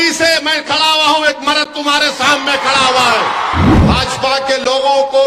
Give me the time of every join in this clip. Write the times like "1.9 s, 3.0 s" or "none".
3.8 s